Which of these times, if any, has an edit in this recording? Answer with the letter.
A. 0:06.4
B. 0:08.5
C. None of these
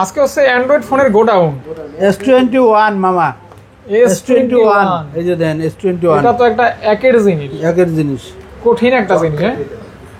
C